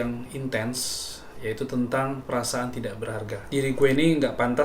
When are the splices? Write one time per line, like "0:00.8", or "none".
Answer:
0:03.4